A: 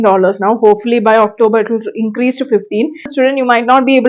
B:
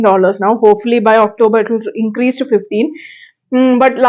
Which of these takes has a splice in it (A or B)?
A